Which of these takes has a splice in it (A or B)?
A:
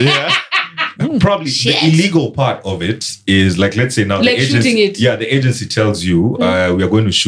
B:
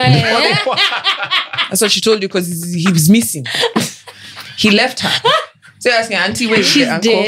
A